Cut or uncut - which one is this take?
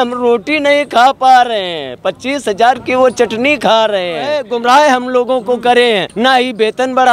cut